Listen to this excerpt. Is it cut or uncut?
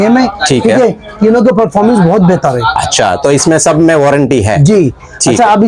uncut